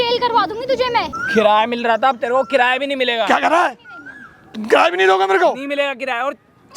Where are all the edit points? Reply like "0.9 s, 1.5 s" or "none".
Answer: 1.2 s